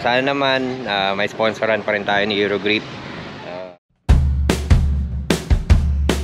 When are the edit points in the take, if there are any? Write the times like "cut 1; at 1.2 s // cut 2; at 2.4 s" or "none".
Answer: cut 1; at 3.4 s